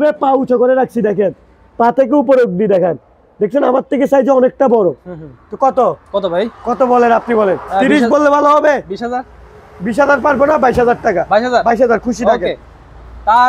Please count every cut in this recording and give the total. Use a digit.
0